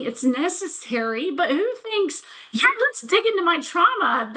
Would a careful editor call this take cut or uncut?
uncut